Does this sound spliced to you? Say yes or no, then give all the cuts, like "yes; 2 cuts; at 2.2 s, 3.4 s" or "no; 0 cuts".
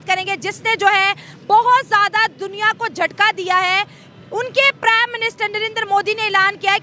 no; 0 cuts